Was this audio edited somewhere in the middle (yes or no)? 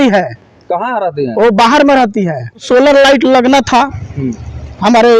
yes